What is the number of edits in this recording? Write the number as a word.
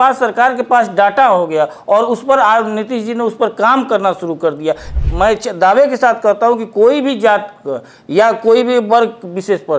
one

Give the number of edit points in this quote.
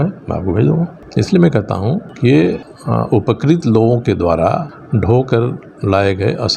four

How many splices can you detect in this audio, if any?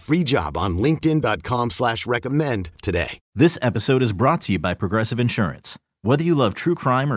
one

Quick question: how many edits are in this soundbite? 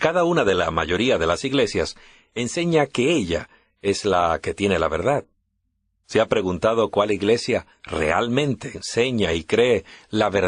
zero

